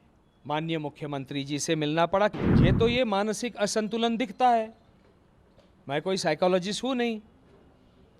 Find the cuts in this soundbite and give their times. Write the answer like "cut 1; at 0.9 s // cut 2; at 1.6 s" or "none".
cut 1; at 2.3 s